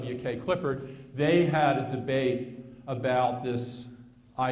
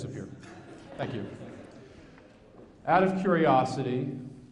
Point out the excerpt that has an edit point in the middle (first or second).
first